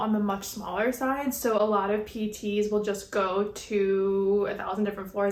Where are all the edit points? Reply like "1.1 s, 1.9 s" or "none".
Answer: none

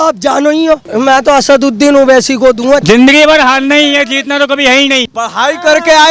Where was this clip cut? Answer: 0.9 s, 2.8 s, 5.1 s

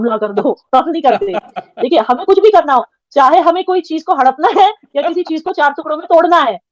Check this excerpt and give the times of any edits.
none

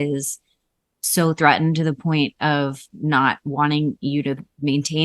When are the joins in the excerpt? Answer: none

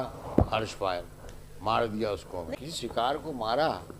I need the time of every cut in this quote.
2.6 s

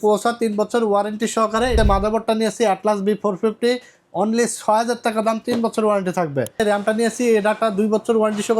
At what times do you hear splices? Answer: 1.7 s, 6.6 s

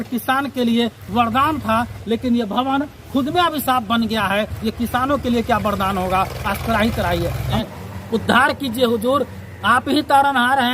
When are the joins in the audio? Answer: 7.6 s

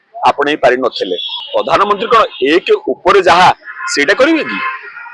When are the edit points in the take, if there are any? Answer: 1.3 s

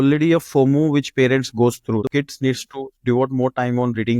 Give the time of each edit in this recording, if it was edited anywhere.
2.0 s

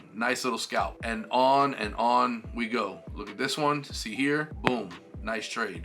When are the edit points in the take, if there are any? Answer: 1.0 s, 4.5 s

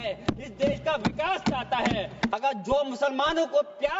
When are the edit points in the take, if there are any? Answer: 2.3 s

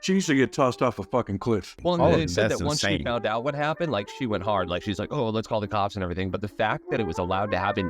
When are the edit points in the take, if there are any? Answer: 1.6 s

